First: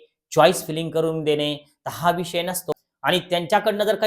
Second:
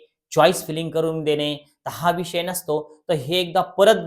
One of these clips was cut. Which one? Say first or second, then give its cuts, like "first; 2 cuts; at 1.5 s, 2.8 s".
first; 1 cut; at 2.7 s